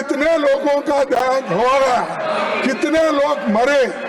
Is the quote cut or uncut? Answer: uncut